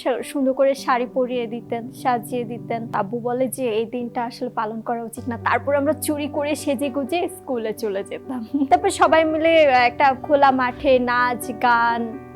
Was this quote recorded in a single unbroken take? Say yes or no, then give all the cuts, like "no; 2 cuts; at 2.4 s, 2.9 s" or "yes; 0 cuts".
no; 2 cuts; at 2.9 s, 8.7 s